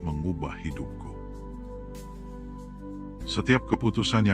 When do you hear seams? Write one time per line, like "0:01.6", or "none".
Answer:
0:00.8
0:03.3